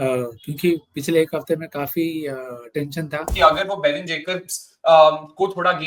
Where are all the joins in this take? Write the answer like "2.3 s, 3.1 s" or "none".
3.3 s